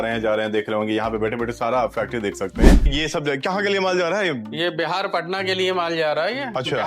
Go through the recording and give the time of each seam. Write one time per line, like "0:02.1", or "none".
0:02.9